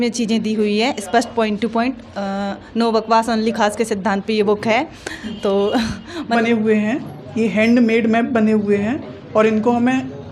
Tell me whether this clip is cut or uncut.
cut